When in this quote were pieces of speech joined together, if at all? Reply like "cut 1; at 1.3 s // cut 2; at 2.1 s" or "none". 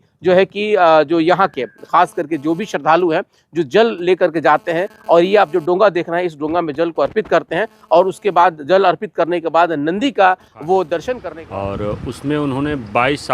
cut 1; at 11.3 s

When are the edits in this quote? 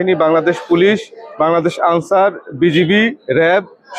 none

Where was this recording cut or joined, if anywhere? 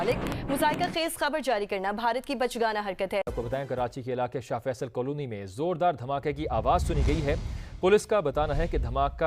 cut 1; at 3.2 s

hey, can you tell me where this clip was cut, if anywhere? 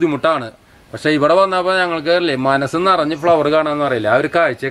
none

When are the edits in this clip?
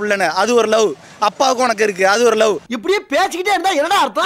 cut 1; at 2.6 s

